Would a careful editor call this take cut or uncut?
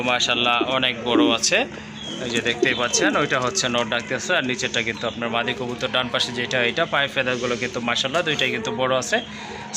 uncut